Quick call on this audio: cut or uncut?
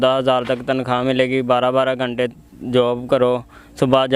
uncut